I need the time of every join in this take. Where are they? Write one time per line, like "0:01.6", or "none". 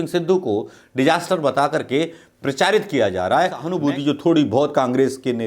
0:03.7